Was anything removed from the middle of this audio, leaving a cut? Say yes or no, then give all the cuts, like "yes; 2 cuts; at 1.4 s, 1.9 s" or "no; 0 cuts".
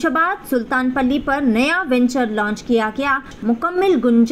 yes; 1 cut; at 3.3 s